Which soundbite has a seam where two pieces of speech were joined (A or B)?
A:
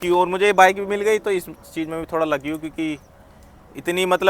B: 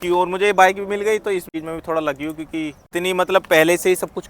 B